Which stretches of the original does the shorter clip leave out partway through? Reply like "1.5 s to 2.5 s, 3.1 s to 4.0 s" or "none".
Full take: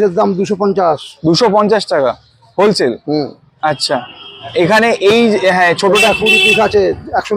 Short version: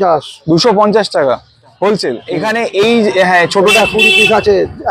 3.1 s to 4.6 s